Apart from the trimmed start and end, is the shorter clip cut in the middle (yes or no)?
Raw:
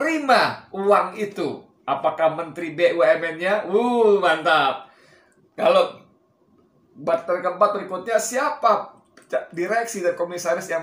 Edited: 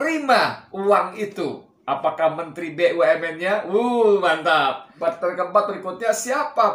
yes